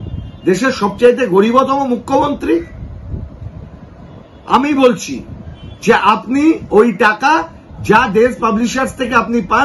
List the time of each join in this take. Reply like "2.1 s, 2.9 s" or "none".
none